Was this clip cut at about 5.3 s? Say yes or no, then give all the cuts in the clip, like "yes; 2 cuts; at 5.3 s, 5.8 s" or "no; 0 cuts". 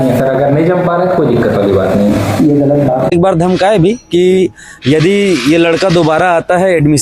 no; 1 cut; at 3.1 s